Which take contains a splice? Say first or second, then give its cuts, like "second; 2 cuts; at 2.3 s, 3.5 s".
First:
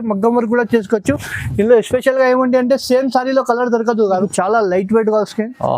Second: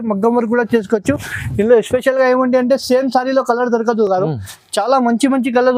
first; 1 cut; at 4.1 s